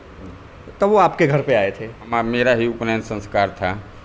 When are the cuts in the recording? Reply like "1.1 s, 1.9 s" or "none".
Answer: 2.0 s